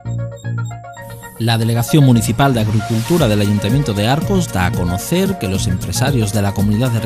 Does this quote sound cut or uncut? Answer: cut